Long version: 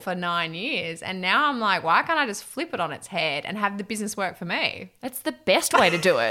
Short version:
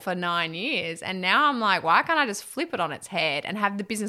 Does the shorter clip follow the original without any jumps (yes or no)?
yes